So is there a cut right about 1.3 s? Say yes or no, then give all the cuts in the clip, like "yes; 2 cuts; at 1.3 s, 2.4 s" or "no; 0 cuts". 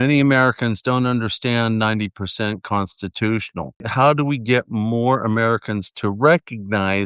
no; 1 cut; at 3.9 s